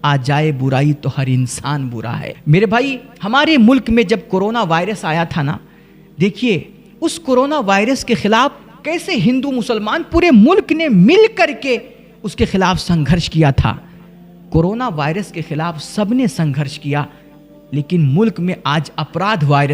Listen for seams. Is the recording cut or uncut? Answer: cut